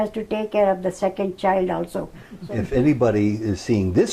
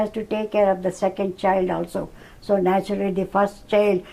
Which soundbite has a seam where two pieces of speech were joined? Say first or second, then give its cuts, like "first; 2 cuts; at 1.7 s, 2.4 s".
first; 1 cut; at 2.3 s